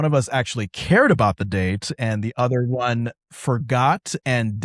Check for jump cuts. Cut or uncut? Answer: uncut